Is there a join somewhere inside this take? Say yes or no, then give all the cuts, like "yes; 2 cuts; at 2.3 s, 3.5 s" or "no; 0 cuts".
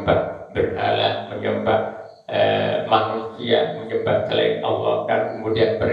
no; 0 cuts